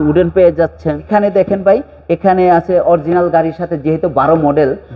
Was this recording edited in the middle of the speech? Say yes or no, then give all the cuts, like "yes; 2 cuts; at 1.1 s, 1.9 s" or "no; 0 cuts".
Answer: yes; 1 cut; at 1.1 s